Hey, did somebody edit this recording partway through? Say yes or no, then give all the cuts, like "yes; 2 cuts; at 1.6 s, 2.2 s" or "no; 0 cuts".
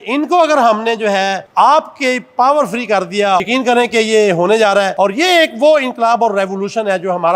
yes; 2 cuts; at 3.4 s, 4.5 s